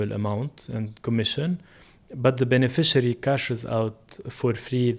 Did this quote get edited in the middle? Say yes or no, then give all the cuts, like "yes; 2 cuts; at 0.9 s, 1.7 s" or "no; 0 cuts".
no; 0 cuts